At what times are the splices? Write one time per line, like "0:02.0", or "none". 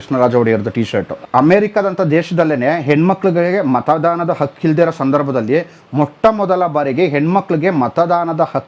0:01.0